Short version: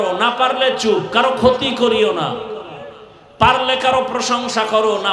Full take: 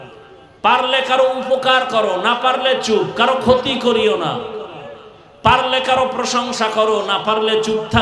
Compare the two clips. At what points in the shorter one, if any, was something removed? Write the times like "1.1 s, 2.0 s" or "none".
none